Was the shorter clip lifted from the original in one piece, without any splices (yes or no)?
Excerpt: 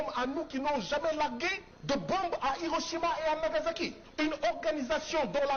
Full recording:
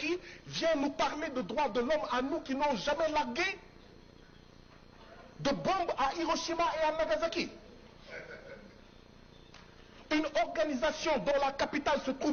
no